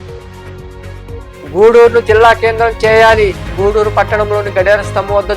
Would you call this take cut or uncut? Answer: cut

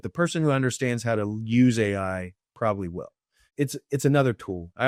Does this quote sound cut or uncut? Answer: uncut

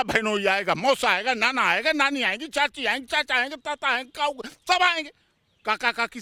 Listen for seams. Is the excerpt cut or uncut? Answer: uncut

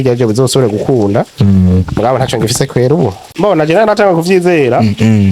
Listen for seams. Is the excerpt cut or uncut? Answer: cut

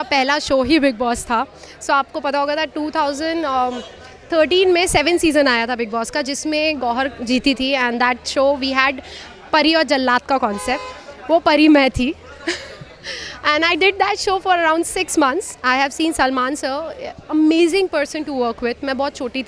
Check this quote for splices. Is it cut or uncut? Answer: uncut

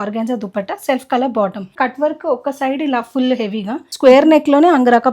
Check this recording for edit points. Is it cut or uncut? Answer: cut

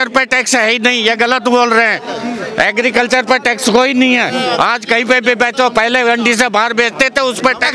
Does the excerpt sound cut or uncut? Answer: uncut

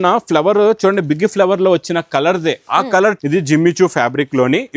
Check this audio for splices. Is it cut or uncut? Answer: cut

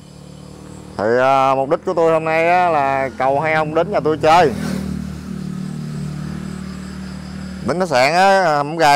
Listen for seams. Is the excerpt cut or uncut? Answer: uncut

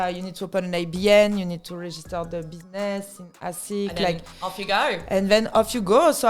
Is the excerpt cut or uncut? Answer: uncut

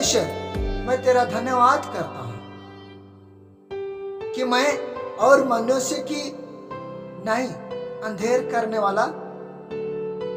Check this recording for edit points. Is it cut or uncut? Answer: uncut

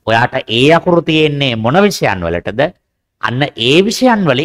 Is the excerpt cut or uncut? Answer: uncut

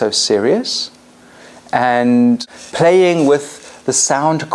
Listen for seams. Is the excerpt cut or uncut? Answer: uncut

